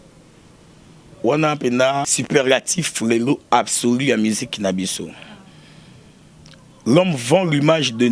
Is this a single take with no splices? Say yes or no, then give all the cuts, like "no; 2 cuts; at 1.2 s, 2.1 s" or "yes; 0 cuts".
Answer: no; 1 cut; at 2.1 s